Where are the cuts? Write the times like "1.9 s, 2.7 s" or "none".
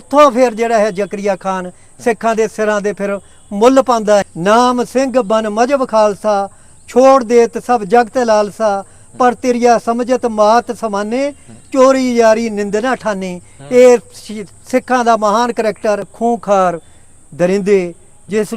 4.2 s, 16.1 s